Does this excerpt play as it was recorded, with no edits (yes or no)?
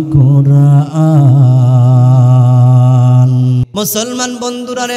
no